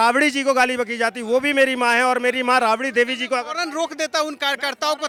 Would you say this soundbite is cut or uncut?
uncut